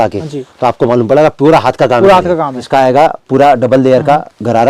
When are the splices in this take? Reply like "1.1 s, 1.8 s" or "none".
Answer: 2.7 s